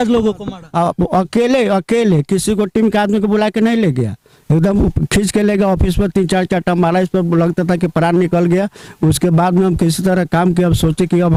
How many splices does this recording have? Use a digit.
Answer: 0